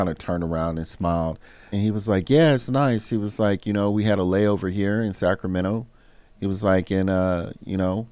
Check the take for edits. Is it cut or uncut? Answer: cut